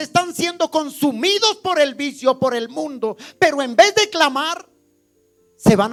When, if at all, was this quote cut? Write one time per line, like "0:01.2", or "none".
none

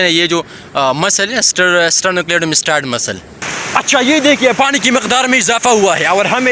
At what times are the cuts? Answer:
0:03.4

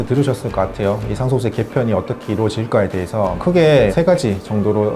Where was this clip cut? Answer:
0:03.4

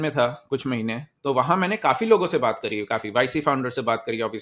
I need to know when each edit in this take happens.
none

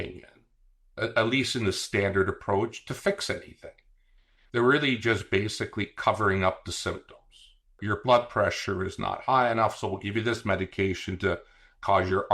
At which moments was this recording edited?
0:07.8

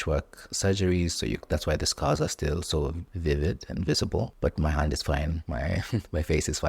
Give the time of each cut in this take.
0:03.1
0:04.3
0:05.4

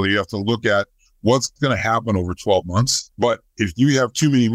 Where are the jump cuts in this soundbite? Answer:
0:03.0

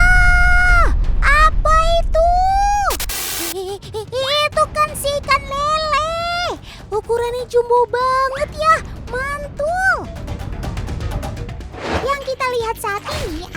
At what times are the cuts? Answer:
0:11.9

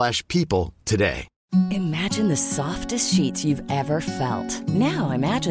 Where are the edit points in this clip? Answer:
0:01.3

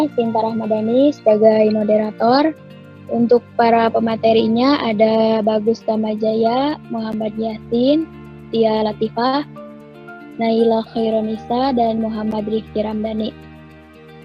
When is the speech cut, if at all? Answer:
0:13.3

